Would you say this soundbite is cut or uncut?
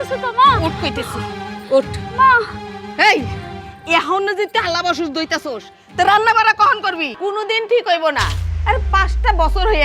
cut